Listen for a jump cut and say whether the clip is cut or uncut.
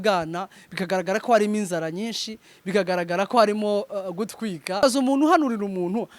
cut